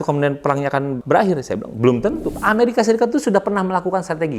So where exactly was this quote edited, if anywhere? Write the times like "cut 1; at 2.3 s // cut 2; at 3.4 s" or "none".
cut 1; at 1.0 s // cut 2; at 2.3 s

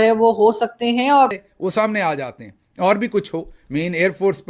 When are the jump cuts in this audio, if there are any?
cut 1; at 1.3 s

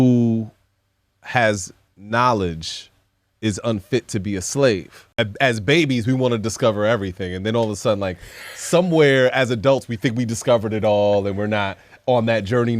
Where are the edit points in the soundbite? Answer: cut 1; at 5.1 s

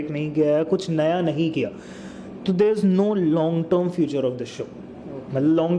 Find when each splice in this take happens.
none

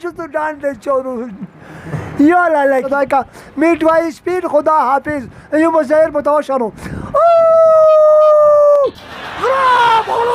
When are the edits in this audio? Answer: cut 1; at 2.9 s

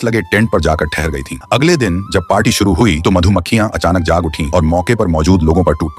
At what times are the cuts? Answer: cut 1; at 4.0 s

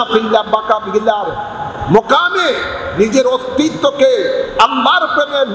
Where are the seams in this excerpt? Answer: none

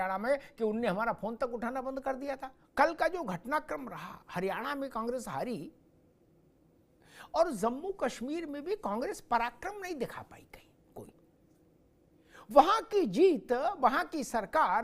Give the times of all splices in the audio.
cut 1; at 2.5 s

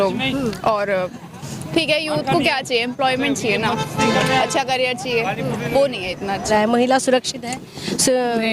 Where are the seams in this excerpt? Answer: cut 1; at 6.4 s

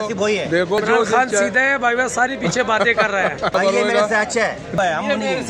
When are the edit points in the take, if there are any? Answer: cut 1; at 0.8 s // cut 2; at 3.5 s // cut 3; at 4.8 s

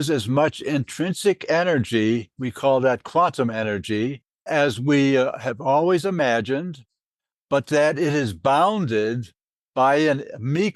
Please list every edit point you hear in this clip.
cut 1; at 4.4 s

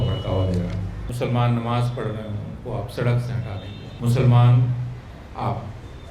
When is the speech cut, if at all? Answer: cut 1; at 1.0 s // cut 2; at 3.8 s

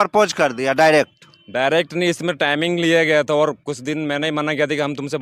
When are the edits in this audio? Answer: none

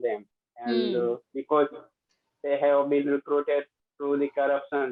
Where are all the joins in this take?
none

